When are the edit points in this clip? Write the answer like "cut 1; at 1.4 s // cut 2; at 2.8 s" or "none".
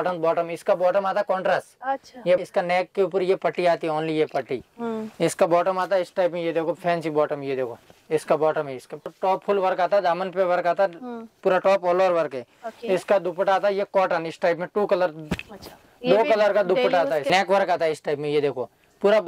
cut 1; at 2.4 s // cut 2; at 9.1 s // cut 3; at 17.3 s